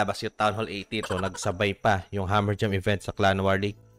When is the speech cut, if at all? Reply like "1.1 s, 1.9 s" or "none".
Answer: 1.0 s